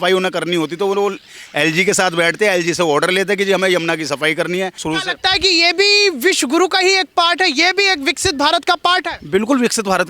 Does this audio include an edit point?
yes; 1 cut; at 4.8 s

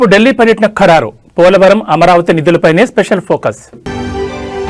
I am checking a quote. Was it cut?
no; 0 cuts

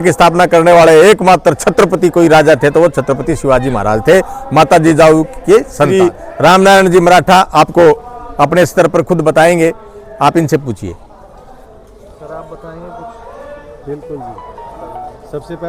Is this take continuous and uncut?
yes; 0 cuts

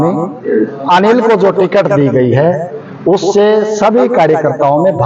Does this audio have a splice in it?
no; 0 cuts

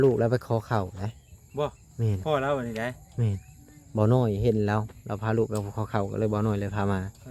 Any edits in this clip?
no; 0 cuts

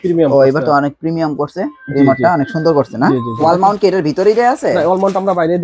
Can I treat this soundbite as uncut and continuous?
yes; 0 cuts

